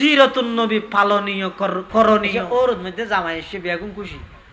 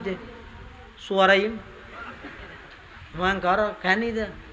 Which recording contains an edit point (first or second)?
first